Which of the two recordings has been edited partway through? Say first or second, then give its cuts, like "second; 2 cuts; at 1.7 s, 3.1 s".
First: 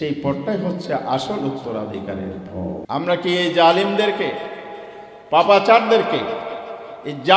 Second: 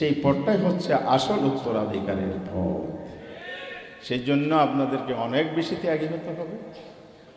first; 1 cut; at 2.8 s